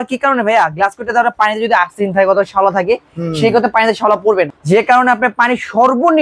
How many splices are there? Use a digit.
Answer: 1